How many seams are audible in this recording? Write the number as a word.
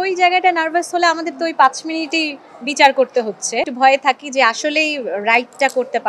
one